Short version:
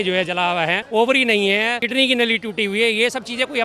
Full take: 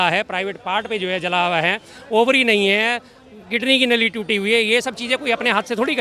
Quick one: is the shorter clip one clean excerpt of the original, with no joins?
no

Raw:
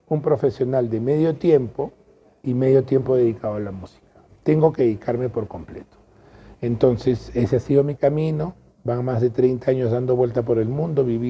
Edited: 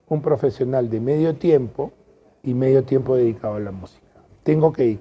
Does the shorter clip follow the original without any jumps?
yes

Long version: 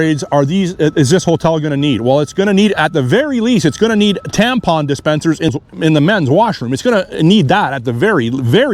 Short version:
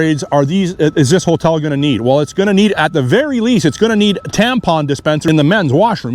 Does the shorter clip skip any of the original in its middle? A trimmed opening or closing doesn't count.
yes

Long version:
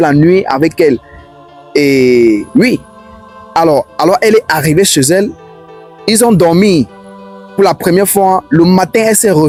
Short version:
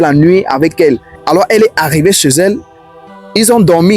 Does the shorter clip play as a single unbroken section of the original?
no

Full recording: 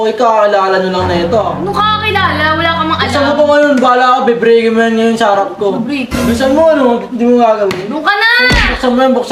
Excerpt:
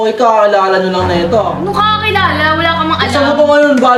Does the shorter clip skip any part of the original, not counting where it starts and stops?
no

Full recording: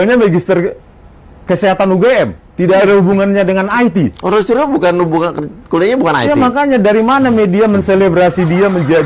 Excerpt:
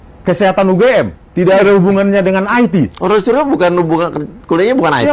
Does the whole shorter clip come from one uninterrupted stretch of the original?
yes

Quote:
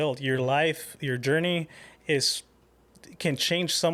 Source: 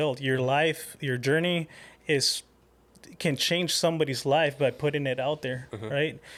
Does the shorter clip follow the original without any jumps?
yes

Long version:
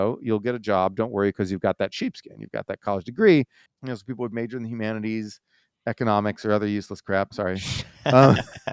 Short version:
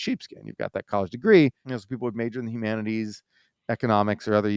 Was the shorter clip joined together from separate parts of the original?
yes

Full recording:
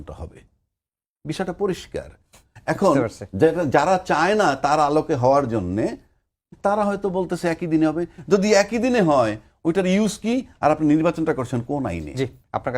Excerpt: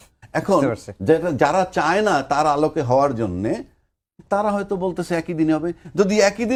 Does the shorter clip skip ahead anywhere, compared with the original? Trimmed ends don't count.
no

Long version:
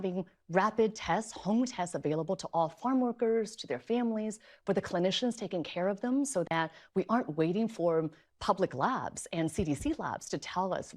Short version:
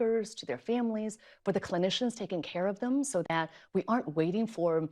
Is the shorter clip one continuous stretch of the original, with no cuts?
yes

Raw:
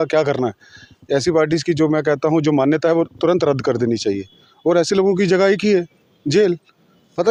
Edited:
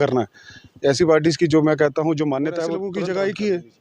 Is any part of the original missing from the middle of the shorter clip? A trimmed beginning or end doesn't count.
yes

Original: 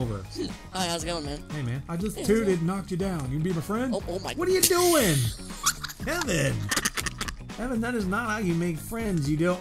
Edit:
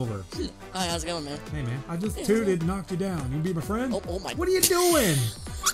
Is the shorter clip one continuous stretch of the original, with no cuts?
yes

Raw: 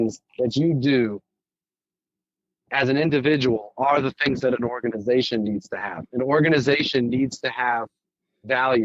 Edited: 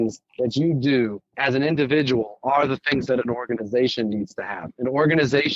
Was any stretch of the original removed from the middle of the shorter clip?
yes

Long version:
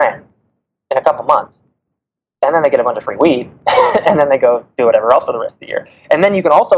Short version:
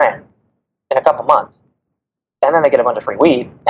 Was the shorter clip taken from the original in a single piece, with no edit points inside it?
yes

